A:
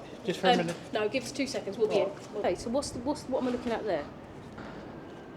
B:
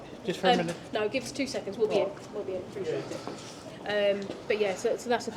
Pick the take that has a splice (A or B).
A